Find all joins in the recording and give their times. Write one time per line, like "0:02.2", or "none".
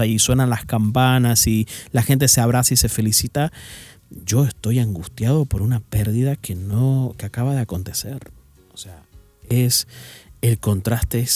none